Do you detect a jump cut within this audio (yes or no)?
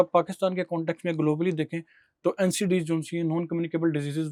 no